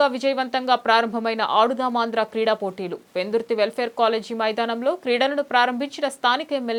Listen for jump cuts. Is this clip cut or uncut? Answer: uncut